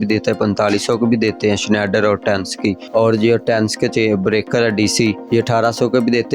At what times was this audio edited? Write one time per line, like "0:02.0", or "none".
0:02.8
0:05.2